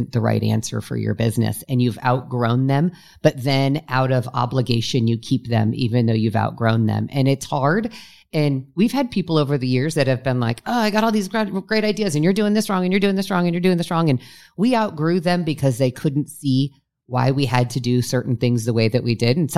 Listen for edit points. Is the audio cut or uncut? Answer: uncut